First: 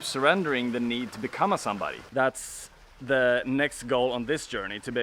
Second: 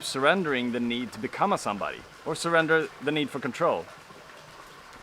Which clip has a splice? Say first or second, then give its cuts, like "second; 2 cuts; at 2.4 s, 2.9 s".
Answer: first; 1 cut; at 2.0 s